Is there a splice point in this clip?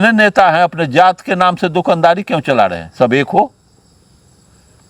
no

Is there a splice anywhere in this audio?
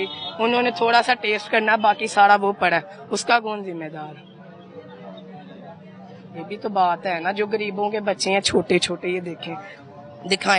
no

